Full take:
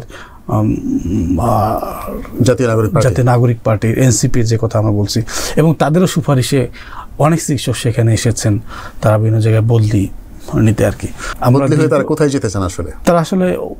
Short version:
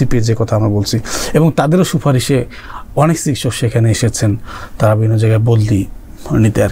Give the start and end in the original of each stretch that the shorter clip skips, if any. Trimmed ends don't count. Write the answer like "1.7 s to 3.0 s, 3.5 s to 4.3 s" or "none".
none